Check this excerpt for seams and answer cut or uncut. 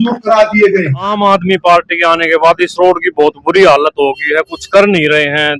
cut